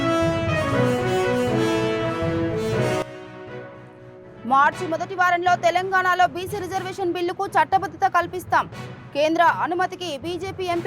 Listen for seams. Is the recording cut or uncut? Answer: cut